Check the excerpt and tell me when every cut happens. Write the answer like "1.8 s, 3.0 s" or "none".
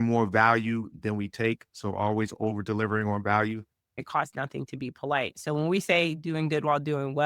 3.9 s